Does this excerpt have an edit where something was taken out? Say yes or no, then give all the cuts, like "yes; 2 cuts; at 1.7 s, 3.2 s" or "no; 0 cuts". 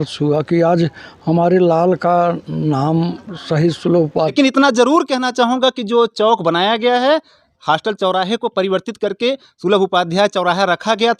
yes; 1 cut; at 4.1 s